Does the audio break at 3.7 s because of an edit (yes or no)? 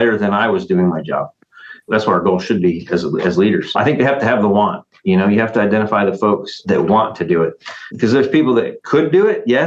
yes